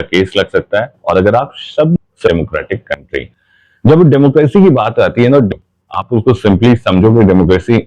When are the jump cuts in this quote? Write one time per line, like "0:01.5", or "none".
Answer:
0:01.9
0:05.5